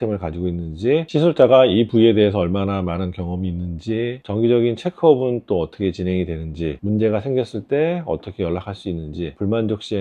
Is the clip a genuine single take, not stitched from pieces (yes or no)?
yes